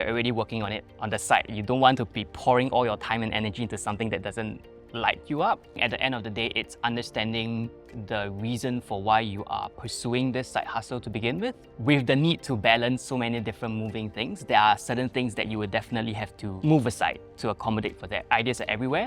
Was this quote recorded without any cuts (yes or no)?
no